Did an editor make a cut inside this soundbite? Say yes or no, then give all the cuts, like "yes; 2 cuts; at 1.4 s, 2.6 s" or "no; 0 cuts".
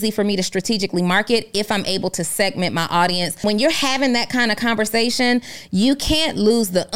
yes; 1 cut; at 3.4 s